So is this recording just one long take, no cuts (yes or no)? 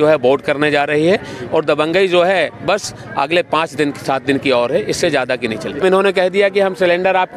no